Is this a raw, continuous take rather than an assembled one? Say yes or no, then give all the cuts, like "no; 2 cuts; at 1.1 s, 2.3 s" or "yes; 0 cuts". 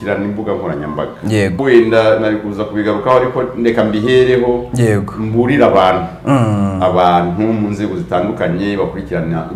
no; 1 cut; at 1.6 s